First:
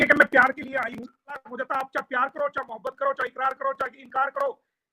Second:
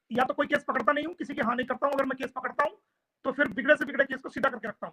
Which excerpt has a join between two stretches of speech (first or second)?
first